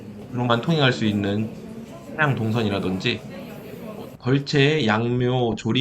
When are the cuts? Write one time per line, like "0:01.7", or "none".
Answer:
0:04.0

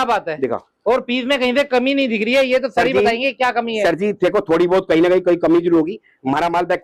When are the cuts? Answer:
none

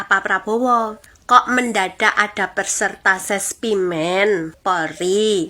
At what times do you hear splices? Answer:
0:01.1
0:04.5

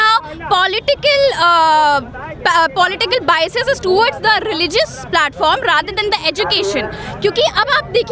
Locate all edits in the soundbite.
none

